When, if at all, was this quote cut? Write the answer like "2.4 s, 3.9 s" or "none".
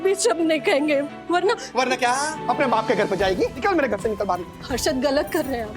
2.4 s, 3.6 s